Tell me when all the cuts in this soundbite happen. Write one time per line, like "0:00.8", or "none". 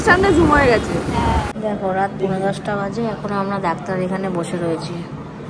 0:01.5